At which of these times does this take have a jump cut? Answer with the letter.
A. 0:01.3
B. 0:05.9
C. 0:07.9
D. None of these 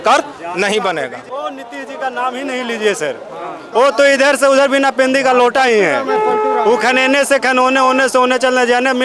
A